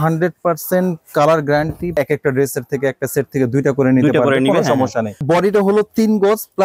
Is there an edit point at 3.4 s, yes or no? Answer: no